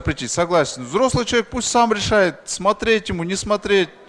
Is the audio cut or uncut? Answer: uncut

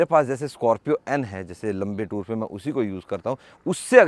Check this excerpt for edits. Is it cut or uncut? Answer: uncut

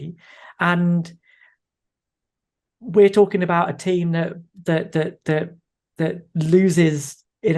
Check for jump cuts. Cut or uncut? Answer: uncut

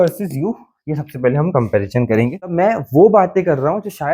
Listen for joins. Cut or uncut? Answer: cut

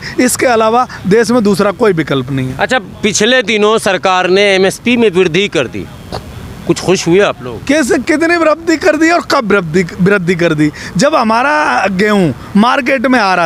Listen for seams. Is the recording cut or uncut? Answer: uncut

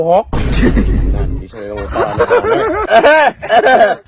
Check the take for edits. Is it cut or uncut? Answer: cut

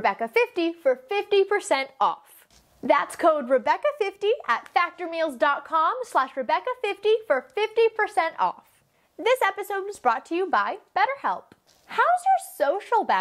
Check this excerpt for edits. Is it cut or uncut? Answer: uncut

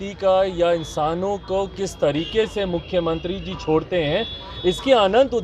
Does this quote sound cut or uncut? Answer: uncut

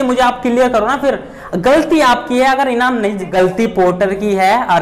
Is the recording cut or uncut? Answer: cut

